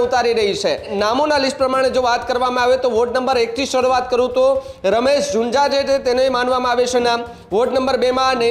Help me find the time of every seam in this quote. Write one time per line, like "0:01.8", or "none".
0:00.9